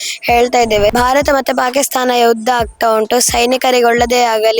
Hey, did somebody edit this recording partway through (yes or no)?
yes